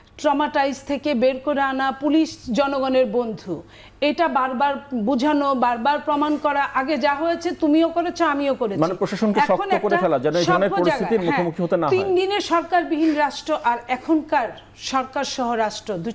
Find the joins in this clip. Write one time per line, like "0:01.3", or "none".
none